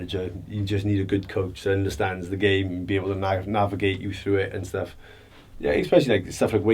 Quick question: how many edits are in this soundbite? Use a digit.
0